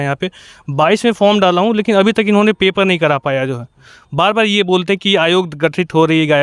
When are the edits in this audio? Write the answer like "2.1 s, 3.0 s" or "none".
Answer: none